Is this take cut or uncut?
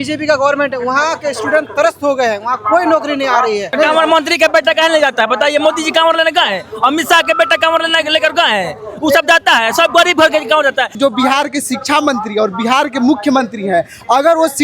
cut